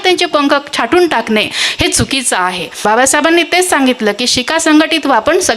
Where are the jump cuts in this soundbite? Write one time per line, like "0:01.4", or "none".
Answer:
0:02.8